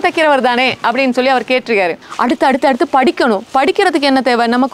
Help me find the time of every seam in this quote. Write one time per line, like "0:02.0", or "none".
0:02.0